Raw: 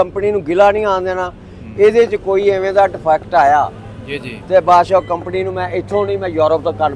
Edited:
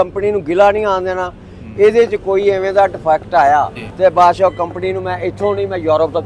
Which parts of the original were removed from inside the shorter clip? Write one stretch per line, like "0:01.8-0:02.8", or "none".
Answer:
0:03.8-0:04.3